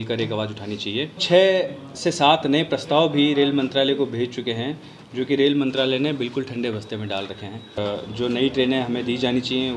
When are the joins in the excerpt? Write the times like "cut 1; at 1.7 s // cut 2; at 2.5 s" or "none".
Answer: cut 1; at 1.2 s // cut 2; at 7.8 s